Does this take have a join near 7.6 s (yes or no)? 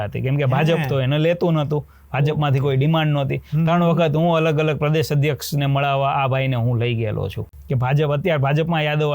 yes